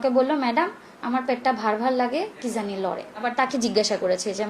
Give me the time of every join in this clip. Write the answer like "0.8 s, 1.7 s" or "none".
3.3 s